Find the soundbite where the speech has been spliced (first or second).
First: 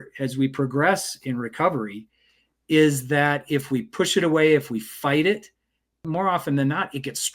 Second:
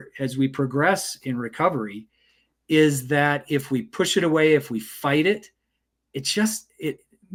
first